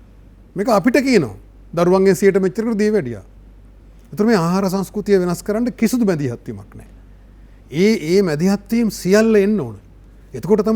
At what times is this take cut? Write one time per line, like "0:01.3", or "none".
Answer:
none